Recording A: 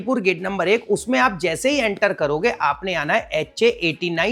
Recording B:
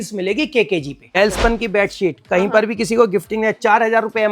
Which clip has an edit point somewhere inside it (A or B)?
B